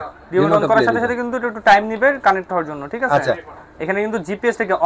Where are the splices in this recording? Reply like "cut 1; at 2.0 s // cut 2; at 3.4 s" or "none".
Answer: none